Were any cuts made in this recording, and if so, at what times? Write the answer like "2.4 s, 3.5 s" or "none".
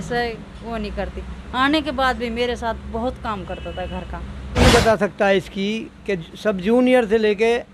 4.6 s